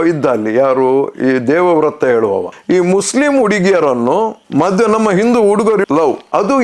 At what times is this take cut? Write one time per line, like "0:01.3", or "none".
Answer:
0:02.5

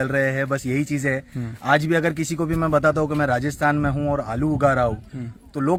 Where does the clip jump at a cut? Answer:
none

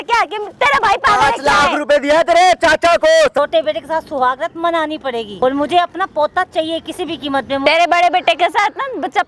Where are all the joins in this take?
0:03.4
0:05.3
0:07.6

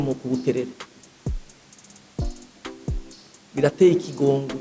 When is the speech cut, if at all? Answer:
0:00.9
0:03.0

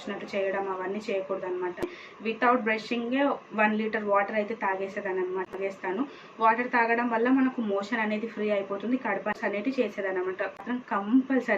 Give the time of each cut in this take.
0:02.0
0:05.5
0:09.4

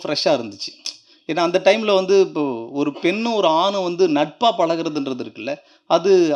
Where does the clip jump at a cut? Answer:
none

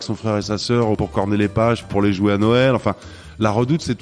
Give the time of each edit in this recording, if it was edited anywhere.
0:01.0
0:01.9

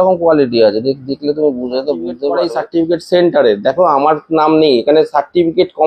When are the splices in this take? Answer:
0:02.5

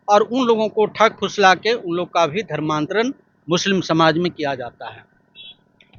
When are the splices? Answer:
none

